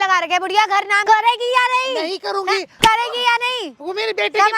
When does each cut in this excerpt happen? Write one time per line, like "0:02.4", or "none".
0:01.0

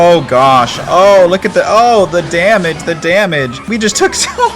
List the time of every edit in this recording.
0:03.6

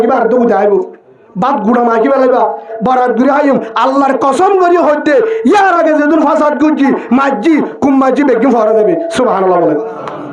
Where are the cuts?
0:02.7

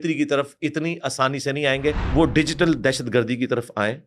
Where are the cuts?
0:02.0

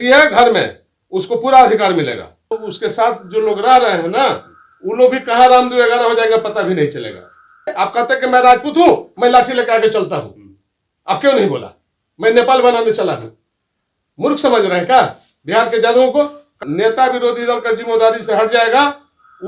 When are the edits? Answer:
0:02.6
0:07.7
0:16.6

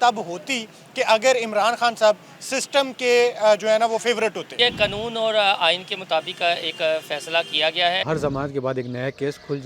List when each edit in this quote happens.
0:04.5
0:08.0

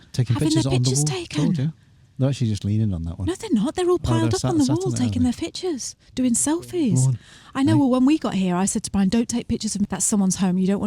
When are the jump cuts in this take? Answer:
0:09.8

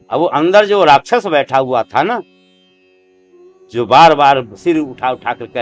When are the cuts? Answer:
none

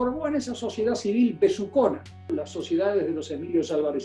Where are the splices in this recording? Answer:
0:02.3

